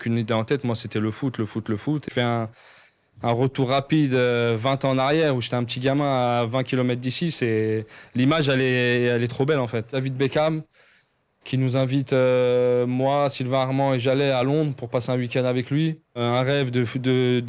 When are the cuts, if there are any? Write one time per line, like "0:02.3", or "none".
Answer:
0:02.1
0:09.9
0:16.2